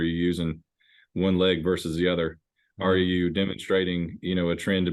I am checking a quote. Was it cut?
no; 0 cuts

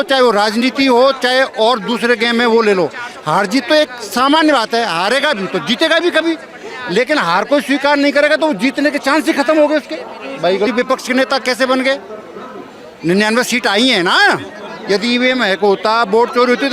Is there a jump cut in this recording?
yes; 1 cut; at 10.7 s

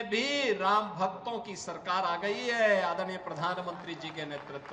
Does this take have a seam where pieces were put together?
no; 0 cuts

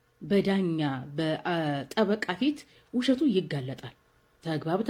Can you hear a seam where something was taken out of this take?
no; 0 cuts

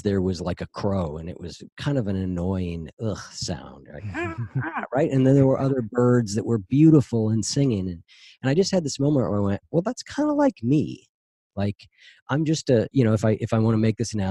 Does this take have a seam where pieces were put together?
no; 0 cuts

